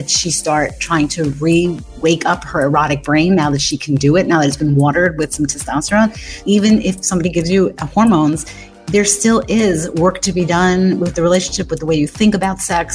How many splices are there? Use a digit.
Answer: 3